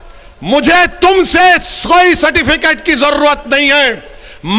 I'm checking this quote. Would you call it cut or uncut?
uncut